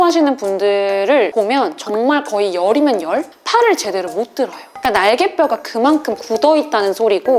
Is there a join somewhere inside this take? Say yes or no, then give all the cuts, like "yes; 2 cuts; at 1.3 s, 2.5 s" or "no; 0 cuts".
yes; 2 cuts; at 1.3 s, 4.6 s